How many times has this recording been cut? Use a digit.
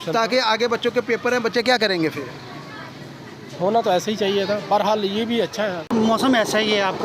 1